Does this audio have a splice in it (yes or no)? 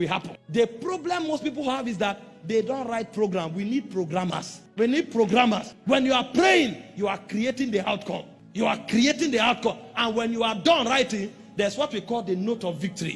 no